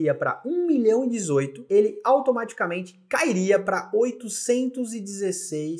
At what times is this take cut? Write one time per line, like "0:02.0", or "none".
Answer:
0:01.6